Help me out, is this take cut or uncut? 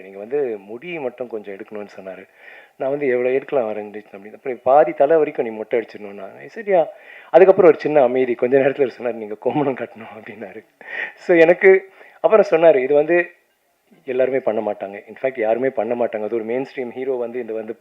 uncut